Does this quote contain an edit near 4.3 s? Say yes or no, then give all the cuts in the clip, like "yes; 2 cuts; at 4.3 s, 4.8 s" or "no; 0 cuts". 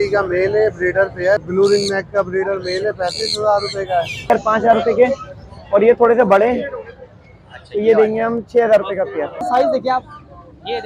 yes; 3 cuts; at 1.4 s, 4.3 s, 9.4 s